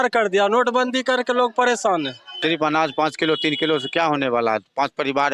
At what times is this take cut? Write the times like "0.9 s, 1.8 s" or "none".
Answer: 2.3 s